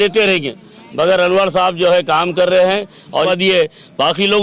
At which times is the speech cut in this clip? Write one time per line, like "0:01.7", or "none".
0:03.3